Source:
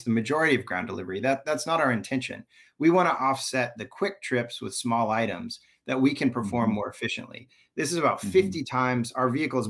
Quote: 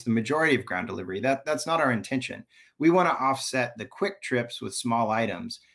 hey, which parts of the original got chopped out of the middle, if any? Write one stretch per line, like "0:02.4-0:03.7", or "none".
none

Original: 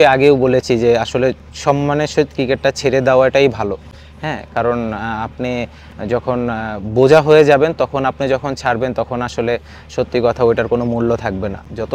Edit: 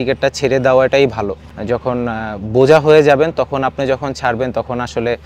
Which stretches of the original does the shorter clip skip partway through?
0:03.9-0:05.9

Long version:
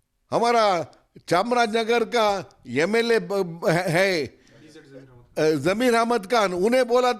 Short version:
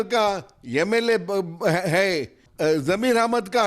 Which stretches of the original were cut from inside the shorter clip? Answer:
0:04.4-0:05.2

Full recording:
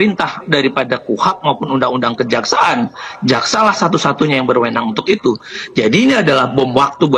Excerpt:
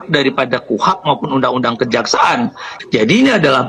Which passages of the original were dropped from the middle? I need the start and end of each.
0:03.1-0:05.5

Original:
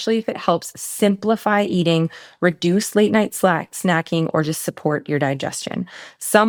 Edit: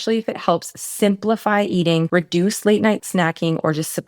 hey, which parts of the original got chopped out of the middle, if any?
0:02.1-0:02.4
0:03.3-0:03.7

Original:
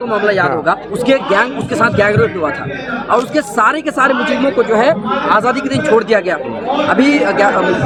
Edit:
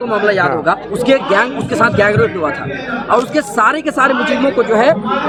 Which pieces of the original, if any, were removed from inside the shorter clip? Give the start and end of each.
none

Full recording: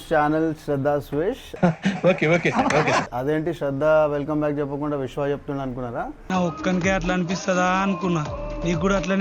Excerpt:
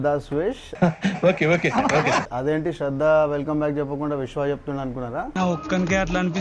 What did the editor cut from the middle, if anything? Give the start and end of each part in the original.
0:06.1-0:06.2

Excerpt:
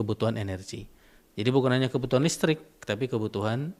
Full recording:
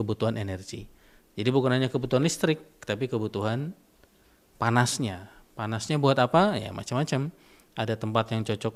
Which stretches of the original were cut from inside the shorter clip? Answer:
none

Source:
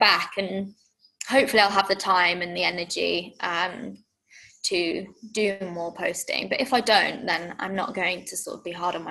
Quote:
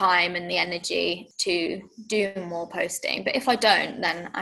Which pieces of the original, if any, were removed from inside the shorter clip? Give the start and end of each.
0:03.3-0:04.5

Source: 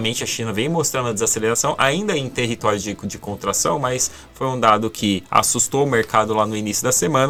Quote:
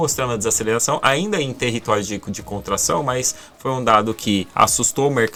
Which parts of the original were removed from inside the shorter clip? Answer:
none

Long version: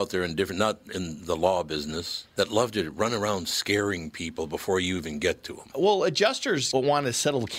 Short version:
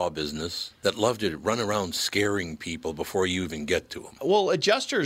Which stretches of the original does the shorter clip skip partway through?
none

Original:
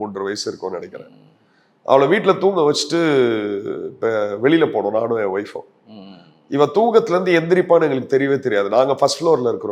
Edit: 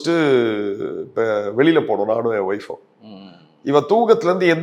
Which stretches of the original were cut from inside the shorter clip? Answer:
none

